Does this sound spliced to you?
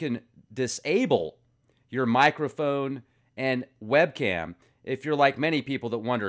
no; 0 cuts

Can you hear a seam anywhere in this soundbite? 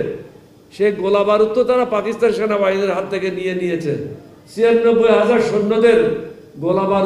no; 0 cuts

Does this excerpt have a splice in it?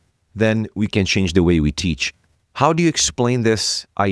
no; 0 cuts

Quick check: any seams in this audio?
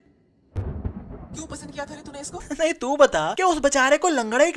yes; 1 cut; at 2.4 s

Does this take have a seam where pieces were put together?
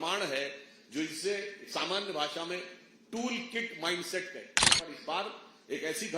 yes; 1 cut; at 4.7 s

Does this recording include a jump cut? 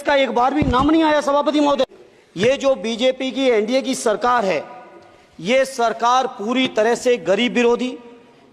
yes; 1 cut; at 1.9 s

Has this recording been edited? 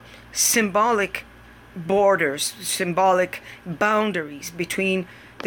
no; 0 cuts

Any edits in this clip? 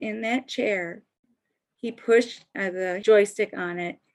yes; 1 cut; at 2.4 s

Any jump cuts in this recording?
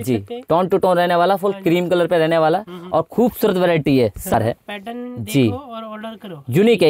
yes; 1 cut; at 4.3 s

